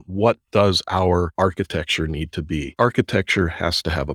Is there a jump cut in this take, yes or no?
yes